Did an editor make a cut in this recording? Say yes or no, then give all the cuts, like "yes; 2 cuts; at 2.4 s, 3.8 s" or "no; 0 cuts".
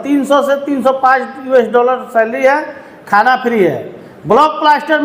no; 0 cuts